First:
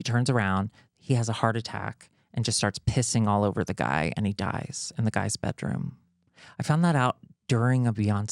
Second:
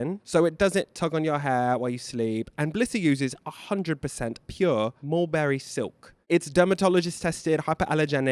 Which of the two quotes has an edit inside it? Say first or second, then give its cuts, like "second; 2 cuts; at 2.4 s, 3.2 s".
second; 2 cuts; at 4.4 s, 6.1 s